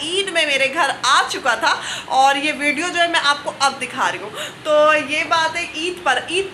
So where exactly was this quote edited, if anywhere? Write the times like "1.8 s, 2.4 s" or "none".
none